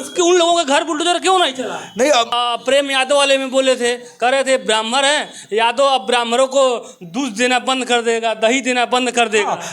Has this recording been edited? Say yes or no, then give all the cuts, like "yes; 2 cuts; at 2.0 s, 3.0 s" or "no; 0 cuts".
yes; 1 cut; at 2.3 s